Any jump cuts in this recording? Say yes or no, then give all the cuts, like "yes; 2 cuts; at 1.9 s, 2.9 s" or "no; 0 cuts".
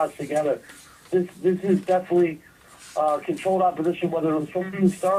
no; 0 cuts